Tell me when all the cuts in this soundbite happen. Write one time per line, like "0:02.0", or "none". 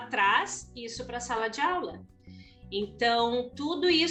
none